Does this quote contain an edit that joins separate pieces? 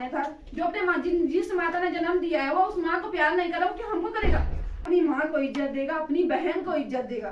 yes; 1 cut; at 4.9 s

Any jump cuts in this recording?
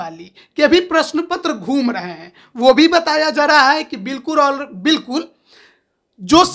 no; 0 cuts

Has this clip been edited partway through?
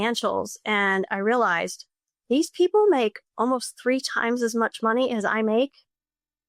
no; 0 cuts

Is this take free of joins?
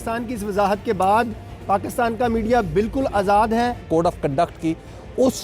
no; 1 cut; at 3.8 s

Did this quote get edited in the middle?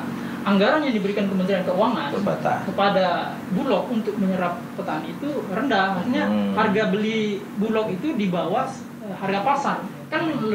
no; 0 cuts

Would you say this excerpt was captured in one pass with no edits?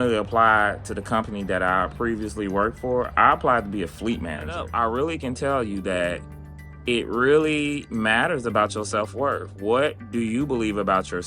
no; 1 cut; at 4.7 s

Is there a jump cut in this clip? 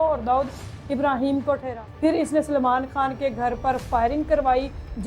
yes; 1 cut; at 1.8 s

